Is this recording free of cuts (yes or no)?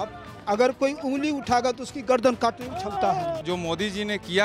no